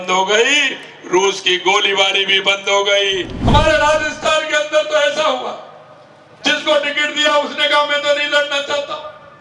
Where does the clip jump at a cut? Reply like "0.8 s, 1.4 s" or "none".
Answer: 3.3 s